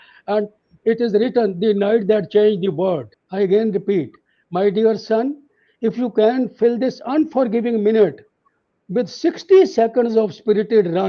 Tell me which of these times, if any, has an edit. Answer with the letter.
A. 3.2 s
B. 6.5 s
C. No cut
A